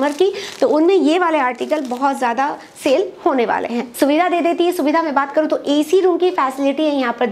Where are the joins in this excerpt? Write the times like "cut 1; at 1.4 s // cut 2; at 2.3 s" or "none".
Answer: cut 1; at 3.8 s